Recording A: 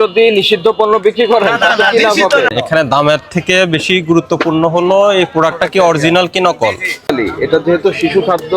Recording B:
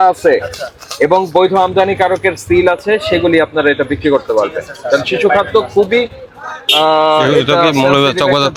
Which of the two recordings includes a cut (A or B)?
A